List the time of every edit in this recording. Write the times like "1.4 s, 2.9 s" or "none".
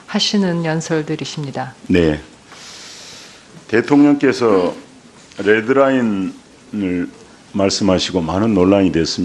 7.6 s